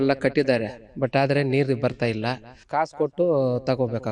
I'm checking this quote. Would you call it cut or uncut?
cut